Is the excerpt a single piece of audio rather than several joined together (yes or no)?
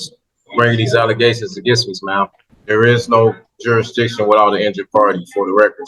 no